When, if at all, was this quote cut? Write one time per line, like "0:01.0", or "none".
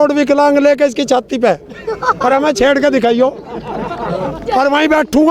none

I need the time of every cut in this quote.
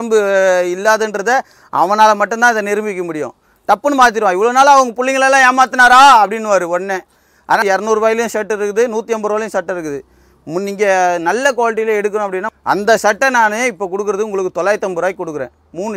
0:07.6
0:12.5

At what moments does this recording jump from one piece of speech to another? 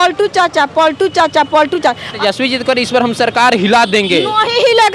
0:02.1

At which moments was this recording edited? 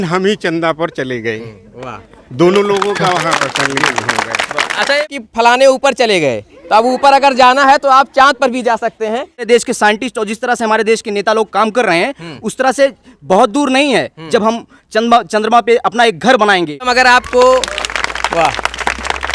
0:05.0
0:09.5
0:16.9

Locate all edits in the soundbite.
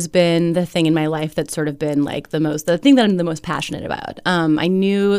none

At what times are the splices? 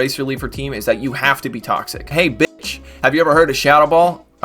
0:02.1

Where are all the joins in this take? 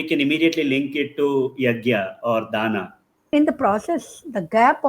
0:03.3

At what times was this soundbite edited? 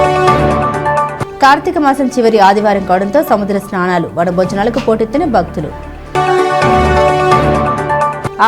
none

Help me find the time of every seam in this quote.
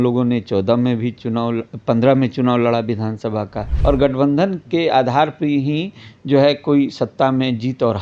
0:03.6

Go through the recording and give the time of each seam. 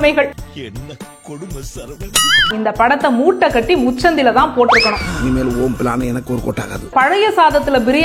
0:02.5
0:06.9

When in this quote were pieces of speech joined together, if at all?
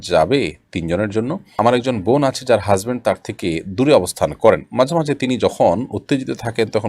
0:01.5

